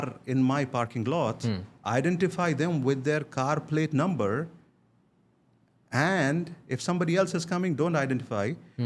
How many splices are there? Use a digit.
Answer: 0